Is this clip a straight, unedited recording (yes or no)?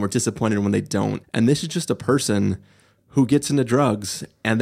no